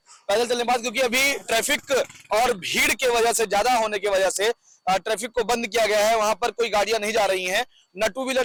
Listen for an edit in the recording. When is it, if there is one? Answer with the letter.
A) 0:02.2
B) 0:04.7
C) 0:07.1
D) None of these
D